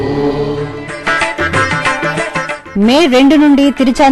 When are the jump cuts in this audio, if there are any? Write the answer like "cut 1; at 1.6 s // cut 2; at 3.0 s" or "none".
cut 1; at 0.9 s // cut 2; at 2.2 s